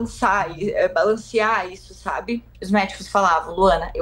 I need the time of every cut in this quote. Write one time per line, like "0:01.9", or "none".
0:02.5